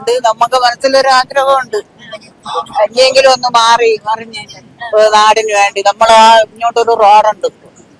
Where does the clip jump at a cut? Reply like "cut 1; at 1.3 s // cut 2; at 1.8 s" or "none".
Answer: none